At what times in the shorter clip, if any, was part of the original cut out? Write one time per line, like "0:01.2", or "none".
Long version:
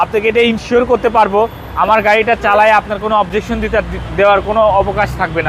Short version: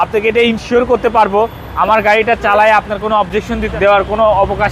0:03.7

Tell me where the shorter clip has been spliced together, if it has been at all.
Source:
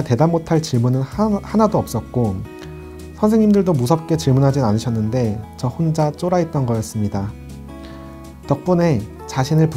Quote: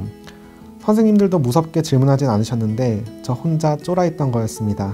none

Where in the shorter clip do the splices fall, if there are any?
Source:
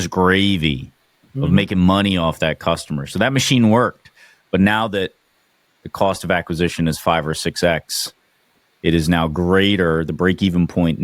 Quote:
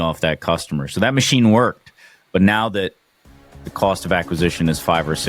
none

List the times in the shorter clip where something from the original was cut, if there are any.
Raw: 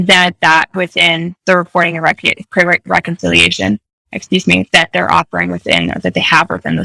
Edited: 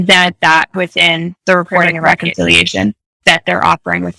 0:02.2
0:03.2

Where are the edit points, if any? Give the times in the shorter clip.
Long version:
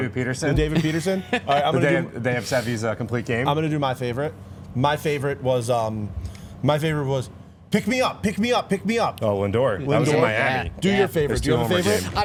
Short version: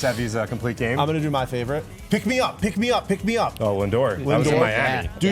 0:01.9

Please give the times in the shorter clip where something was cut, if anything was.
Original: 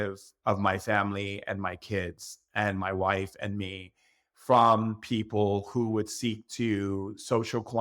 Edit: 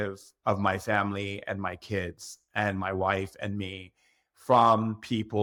none

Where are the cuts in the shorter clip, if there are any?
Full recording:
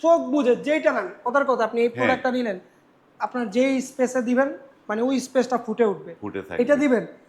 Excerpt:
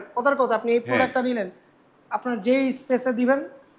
none

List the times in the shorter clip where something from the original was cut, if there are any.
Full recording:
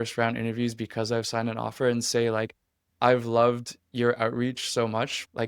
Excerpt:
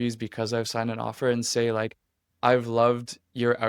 none

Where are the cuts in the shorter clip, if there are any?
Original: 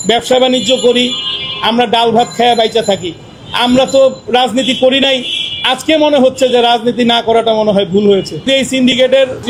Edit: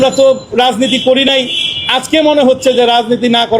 none

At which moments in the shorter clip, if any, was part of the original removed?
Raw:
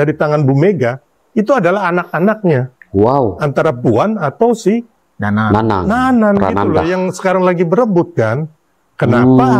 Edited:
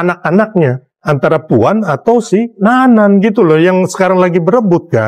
0:01.0
0:02.6

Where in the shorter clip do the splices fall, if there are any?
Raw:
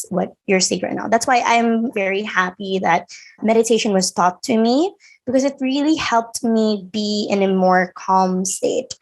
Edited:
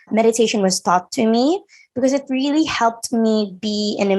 none

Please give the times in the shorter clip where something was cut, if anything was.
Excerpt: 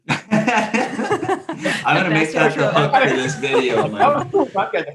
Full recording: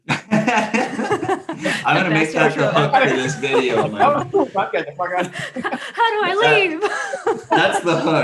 none

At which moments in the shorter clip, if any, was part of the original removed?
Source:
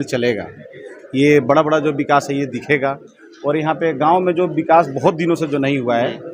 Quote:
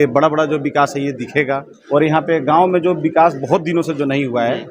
0:01.7

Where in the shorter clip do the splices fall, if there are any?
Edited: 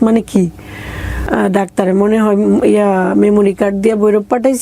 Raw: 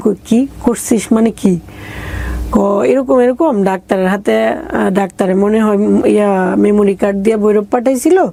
0:01.2

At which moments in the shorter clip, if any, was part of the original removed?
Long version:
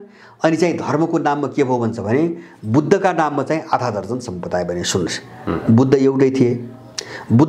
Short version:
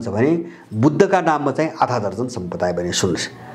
none

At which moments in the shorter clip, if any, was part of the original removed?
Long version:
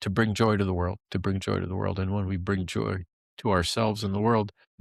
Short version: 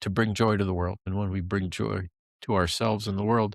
0:01.1

